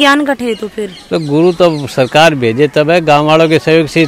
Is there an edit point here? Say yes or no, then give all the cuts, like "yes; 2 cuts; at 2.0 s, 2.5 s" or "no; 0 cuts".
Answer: no; 0 cuts